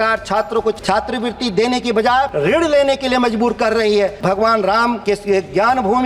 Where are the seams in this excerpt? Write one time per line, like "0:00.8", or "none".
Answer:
0:00.8
0:02.3
0:04.2
0:05.0